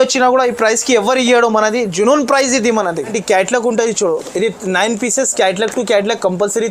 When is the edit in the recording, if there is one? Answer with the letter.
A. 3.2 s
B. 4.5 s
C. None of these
A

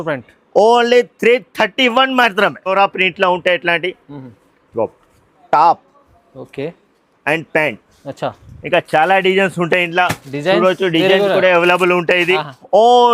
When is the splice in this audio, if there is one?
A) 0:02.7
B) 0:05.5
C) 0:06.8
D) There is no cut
A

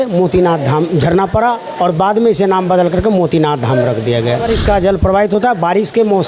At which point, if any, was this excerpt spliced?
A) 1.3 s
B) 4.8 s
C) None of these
B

